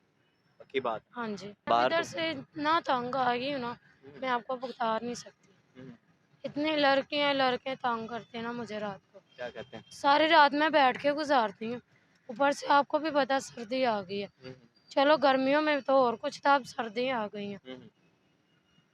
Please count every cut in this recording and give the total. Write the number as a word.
one